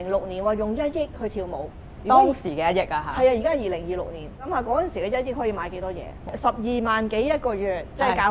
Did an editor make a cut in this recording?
yes; 2 cuts; at 4.5 s, 6.4 s

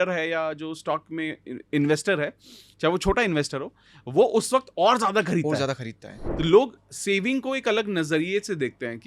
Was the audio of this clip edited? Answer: yes; 1 cut; at 6.2 s

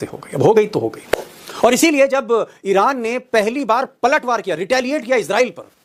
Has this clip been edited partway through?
no; 0 cuts

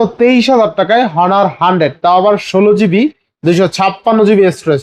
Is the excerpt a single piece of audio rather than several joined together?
yes; 0 cuts

